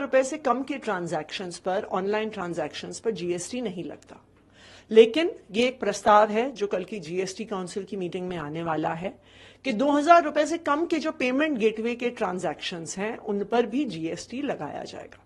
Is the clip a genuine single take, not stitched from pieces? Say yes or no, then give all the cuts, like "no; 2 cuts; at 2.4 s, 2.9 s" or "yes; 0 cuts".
yes; 0 cuts